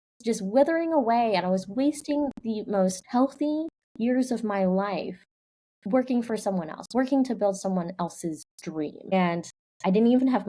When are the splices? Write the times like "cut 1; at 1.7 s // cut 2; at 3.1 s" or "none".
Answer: cut 1; at 3.0 s // cut 2; at 9.1 s